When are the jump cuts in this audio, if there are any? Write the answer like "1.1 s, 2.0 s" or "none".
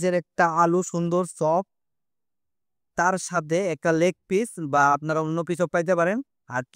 none